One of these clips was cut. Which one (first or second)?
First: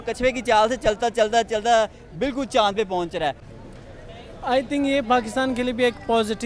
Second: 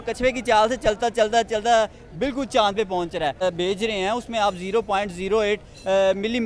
second